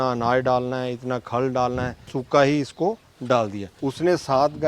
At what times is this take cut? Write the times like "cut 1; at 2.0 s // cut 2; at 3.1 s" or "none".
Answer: cut 1; at 2.2 s // cut 2; at 3.7 s